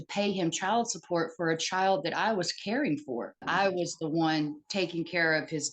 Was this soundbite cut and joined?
yes; 1 cut; at 3.4 s

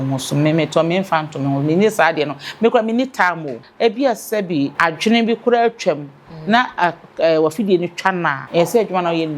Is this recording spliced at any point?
yes; 3 cuts; at 3.6 s, 4.7 s, 8.4 s

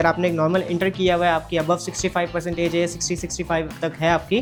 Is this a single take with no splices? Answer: yes; 0 cuts

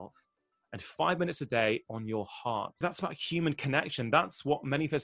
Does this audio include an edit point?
yes; 1 cut; at 2.8 s

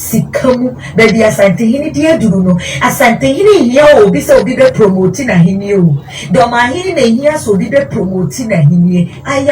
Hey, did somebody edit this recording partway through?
no; 0 cuts

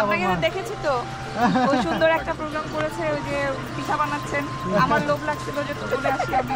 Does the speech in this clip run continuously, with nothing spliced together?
yes; 0 cuts

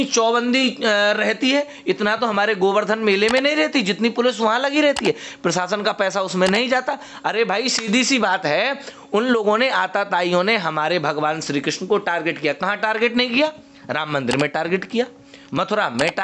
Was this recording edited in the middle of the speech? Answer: no; 0 cuts

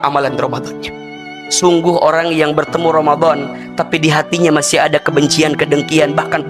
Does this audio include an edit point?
yes; 1 cut; at 1.2 s

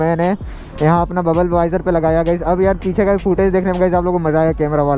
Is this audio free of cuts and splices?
yes; 0 cuts

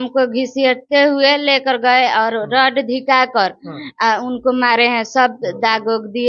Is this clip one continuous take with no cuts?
yes; 0 cuts

